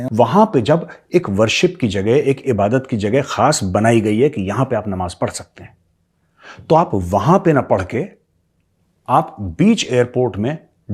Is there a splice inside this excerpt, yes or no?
no